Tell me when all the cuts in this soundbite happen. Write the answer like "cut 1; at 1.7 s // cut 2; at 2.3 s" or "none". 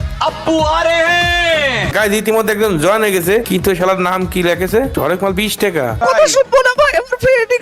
cut 1; at 1.9 s // cut 2; at 3.5 s // cut 3; at 4.9 s // cut 4; at 6.0 s